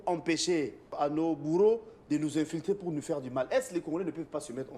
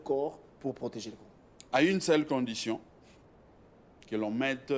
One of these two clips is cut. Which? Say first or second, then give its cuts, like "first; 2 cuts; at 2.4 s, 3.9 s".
first; 1 cut; at 0.9 s